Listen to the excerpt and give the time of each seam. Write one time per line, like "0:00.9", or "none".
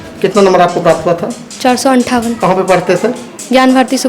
none